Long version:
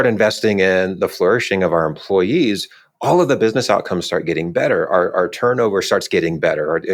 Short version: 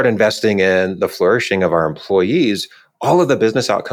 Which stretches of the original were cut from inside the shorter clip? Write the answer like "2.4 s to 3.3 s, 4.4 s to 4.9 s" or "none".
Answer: none